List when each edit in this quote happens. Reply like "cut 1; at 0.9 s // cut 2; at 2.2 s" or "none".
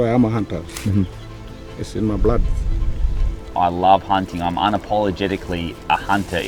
cut 1; at 3.4 s